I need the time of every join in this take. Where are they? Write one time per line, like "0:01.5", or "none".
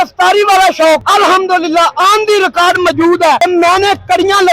0:01.0
0:03.4